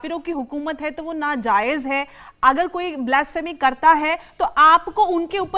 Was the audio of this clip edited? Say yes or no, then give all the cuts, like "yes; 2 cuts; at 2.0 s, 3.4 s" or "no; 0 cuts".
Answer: no; 0 cuts